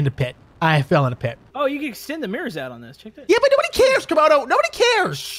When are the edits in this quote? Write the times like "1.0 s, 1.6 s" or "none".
1.4 s